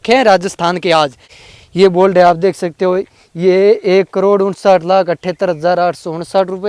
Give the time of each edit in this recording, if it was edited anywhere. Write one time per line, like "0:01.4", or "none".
0:01.3